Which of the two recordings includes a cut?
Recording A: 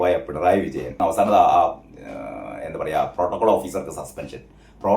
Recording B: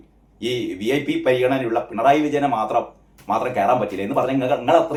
A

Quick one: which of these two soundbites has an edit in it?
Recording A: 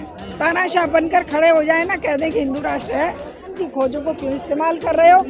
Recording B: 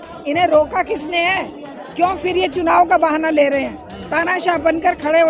A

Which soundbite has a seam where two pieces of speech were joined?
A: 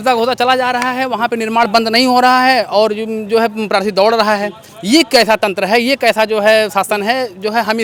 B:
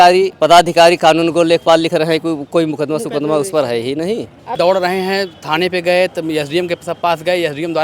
B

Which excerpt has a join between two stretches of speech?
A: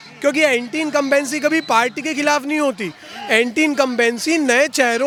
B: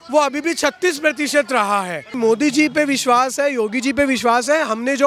B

